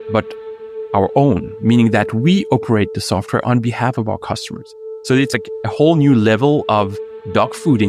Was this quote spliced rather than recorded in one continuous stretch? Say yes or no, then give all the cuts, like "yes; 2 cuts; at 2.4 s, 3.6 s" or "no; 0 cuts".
no; 0 cuts